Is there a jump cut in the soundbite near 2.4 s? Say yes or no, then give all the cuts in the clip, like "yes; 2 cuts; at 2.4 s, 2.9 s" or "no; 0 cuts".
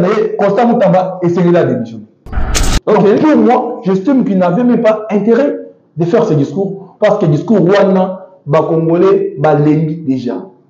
yes; 1 cut; at 2.4 s